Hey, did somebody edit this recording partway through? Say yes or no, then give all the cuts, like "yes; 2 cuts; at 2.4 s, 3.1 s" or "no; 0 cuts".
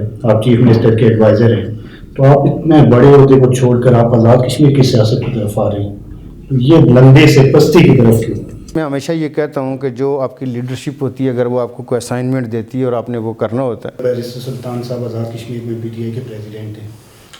yes; 2 cuts; at 8.8 s, 14.0 s